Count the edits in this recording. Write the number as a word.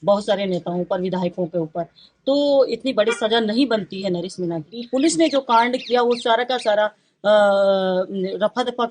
one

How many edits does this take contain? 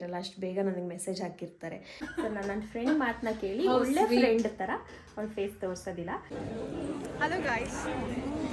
two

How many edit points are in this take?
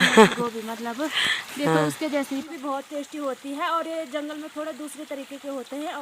one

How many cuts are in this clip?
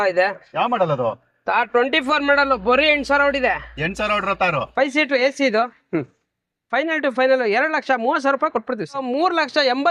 two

